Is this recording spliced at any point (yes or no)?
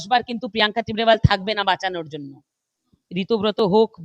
yes